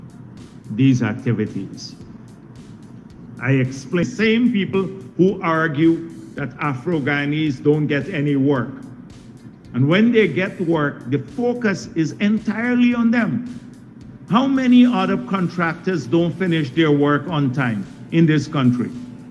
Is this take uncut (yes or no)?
no